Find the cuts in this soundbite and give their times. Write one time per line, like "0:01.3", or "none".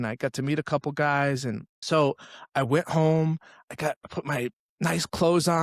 0:01.7